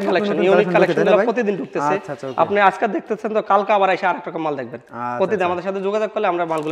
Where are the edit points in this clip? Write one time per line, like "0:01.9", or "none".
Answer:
none